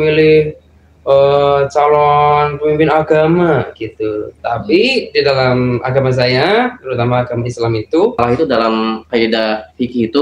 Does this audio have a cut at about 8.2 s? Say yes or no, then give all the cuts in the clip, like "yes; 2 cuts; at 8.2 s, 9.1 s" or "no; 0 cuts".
yes; 1 cut; at 8.2 s